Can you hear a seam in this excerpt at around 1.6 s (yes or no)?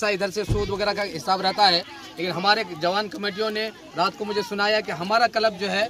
no